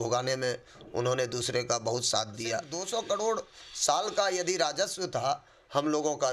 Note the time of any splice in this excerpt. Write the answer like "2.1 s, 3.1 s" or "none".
2.7 s